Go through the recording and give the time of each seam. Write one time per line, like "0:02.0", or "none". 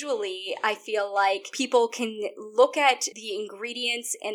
0:01.5
0:03.1

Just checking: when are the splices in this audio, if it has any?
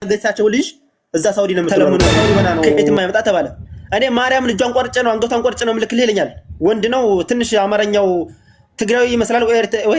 0:02.9

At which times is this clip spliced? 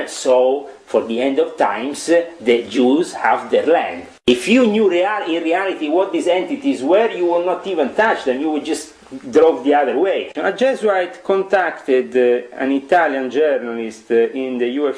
0:04.3
0:10.3

